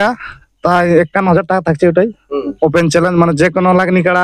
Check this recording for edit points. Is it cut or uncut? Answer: uncut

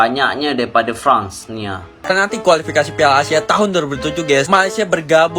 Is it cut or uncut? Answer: cut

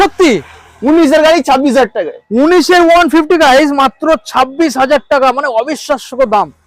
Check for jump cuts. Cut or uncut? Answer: uncut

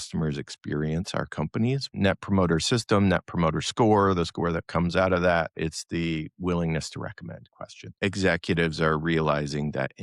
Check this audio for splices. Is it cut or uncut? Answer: cut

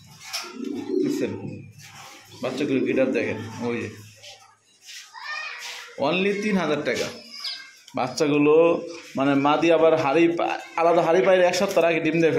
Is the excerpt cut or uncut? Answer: uncut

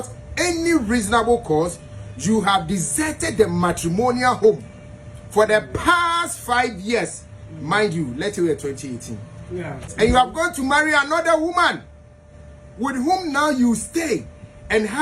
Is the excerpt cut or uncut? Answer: cut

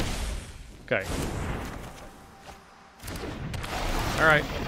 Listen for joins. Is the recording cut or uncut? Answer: uncut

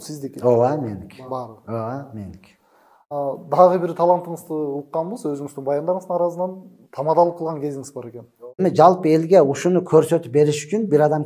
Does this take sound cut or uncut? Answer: cut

